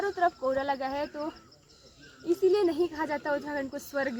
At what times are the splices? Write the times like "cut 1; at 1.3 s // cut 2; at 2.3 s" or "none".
none